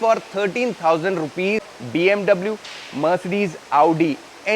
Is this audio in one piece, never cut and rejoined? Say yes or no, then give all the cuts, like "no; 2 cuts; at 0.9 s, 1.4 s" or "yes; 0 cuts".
no; 1 cut; at 1.6 s